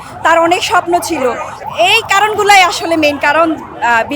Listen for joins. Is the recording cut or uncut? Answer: cut